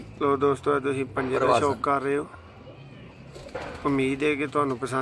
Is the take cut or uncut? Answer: uncut